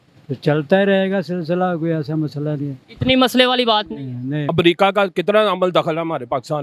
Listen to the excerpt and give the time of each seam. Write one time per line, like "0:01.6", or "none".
0:04.4